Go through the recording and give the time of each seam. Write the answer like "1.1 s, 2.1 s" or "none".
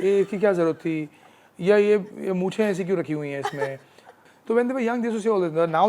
none

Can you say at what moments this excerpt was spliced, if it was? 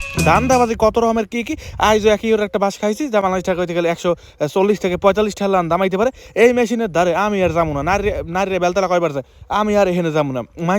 none

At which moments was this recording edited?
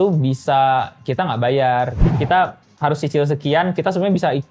2.0 s

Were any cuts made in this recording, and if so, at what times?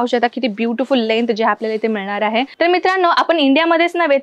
2.5 s

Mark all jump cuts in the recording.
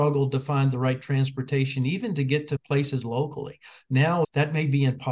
2.6 s, 4.2 s

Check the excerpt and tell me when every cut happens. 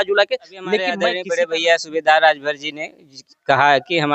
1.0 s

